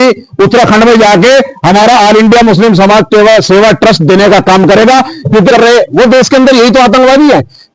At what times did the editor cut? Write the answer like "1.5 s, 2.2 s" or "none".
5.5 s